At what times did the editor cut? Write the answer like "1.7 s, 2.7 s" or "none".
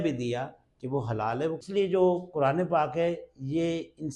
1.6 s